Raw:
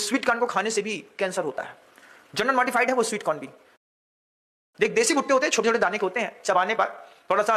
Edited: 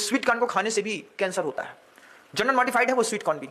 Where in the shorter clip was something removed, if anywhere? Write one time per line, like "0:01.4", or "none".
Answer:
none